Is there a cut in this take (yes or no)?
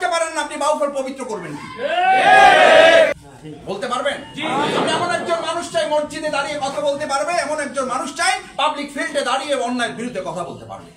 yes